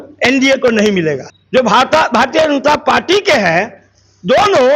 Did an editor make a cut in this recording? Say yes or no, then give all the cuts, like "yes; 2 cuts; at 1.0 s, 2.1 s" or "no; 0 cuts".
yes; 1 cut; at 1.3 s